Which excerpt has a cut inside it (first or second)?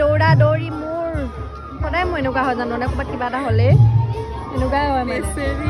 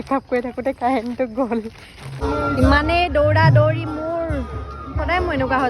second